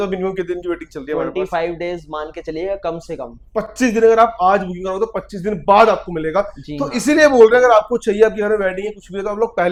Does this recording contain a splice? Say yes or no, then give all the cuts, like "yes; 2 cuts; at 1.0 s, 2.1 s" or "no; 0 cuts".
no; 0 cuts